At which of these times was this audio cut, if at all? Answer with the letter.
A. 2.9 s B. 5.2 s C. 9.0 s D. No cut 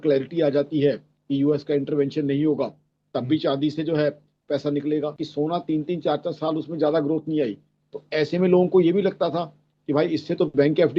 B